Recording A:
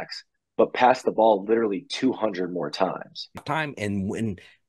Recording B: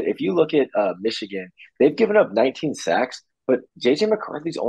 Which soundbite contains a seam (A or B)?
A